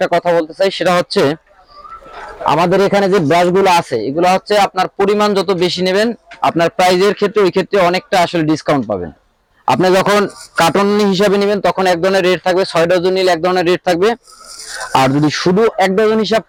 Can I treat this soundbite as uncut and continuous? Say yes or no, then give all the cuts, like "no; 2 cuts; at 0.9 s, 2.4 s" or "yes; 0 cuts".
yes; 0 cuts